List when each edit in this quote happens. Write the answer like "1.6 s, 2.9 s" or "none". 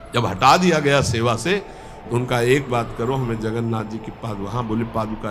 none